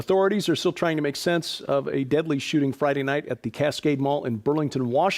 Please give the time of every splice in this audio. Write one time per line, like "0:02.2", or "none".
none